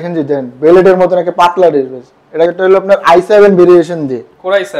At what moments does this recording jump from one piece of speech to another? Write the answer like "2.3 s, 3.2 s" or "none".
2.5 s